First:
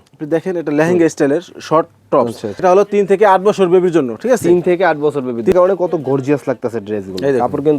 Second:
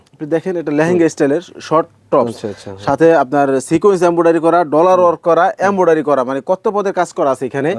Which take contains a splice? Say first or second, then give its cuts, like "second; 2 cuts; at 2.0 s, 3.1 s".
first; 2 cuts; at 2.5 s, 5.5 s